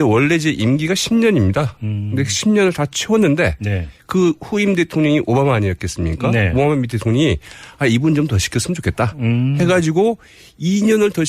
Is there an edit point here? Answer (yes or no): no